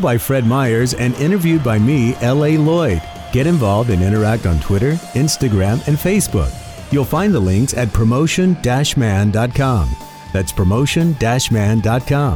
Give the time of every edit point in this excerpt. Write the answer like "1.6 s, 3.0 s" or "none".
none